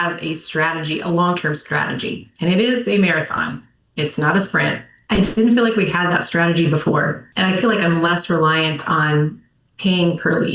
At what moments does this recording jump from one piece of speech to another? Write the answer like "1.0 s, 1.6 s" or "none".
4.9 s, 7.2 s